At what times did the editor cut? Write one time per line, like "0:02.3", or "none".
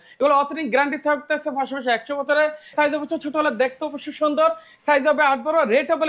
0:02.7